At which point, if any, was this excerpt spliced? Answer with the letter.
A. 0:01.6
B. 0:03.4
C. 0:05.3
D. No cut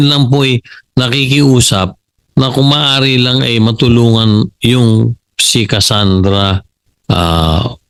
D